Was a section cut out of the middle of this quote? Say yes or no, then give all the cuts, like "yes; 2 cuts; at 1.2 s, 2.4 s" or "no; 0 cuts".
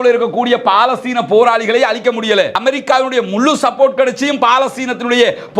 yes; 1 cut; at 2.6 s